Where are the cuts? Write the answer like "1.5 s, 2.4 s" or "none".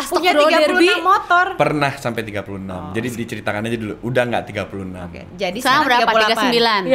none